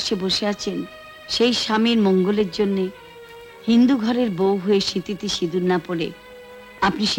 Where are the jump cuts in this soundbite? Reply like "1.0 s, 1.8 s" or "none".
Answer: none